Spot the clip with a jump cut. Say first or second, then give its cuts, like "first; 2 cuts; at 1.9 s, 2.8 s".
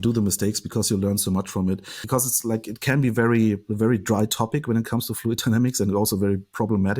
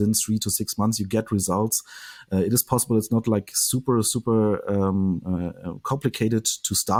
first; 1 cut; at 1.9 s